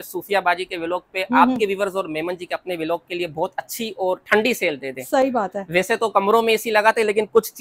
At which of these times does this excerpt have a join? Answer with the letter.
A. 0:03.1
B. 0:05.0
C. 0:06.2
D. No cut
D